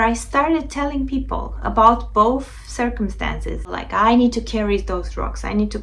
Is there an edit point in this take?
yes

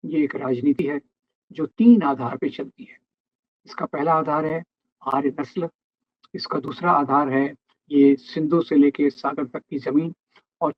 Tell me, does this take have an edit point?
no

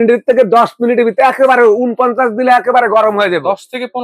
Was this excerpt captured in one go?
yes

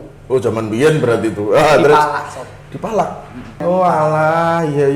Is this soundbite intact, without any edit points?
no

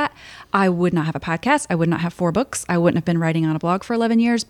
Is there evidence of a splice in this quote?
no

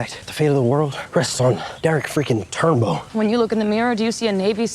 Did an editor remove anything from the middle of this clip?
no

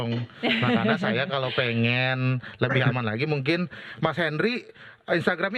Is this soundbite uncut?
yes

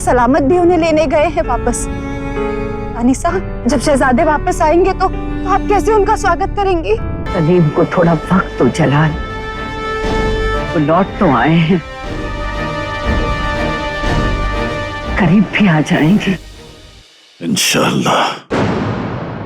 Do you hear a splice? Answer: yes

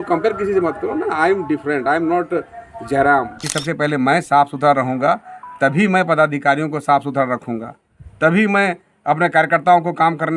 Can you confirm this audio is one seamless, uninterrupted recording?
no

